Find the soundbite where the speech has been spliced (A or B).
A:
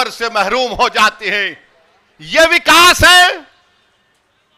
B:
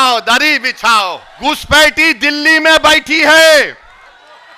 B